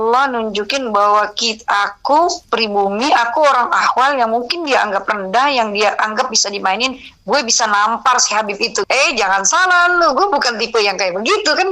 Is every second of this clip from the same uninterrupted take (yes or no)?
no